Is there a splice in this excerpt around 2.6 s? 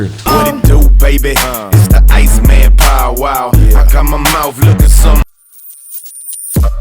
no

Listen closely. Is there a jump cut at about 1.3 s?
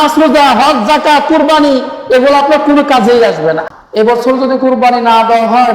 no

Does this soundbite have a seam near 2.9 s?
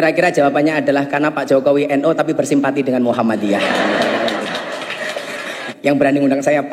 no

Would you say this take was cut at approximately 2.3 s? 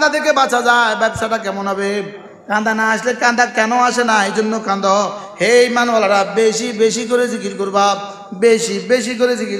yes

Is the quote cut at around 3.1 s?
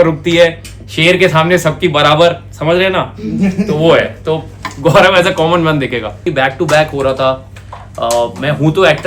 no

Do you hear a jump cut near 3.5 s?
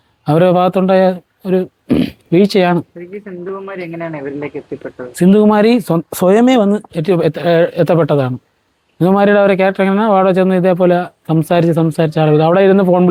no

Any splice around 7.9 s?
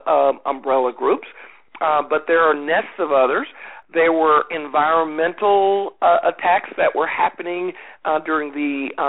no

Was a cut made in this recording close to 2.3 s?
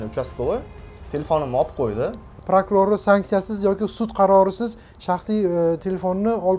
yes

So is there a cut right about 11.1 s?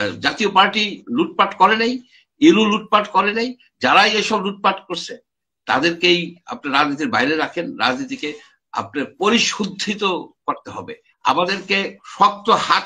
yes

